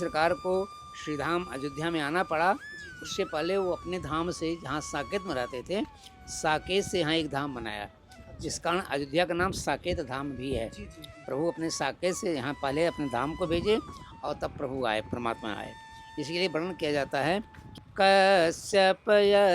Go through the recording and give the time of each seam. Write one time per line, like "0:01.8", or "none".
0:17.9

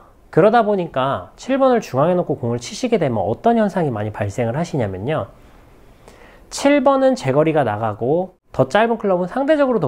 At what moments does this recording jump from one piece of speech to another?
0:08.4

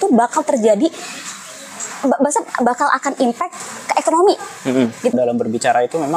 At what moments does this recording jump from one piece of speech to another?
0:05.1

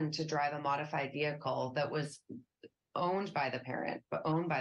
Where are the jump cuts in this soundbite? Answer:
none

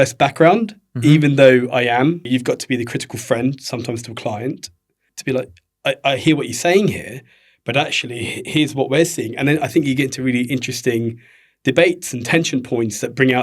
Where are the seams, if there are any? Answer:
0:02.2
0:05.1

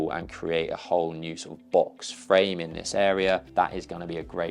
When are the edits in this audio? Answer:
0:03.5

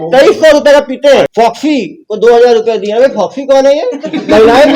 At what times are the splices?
0:01.3

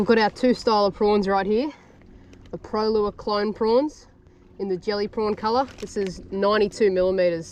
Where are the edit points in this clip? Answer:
none

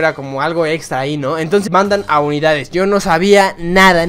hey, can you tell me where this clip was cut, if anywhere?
0:01.7

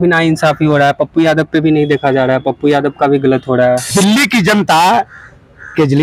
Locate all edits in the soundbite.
0:03.8

